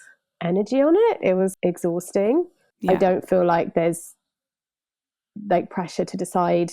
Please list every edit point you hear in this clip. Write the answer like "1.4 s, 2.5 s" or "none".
1.5 s, 2.6 s